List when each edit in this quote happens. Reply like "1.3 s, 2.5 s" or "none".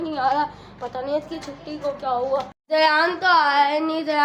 2.6 s